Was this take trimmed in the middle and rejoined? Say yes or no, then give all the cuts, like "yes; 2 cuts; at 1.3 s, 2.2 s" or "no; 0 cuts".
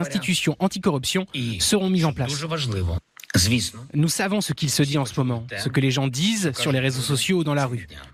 no; 0 cuts